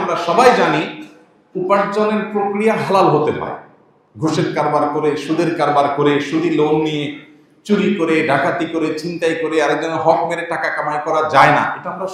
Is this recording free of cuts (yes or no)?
yes